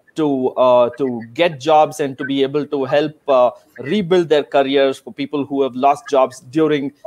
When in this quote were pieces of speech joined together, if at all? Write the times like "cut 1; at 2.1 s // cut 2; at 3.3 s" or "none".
none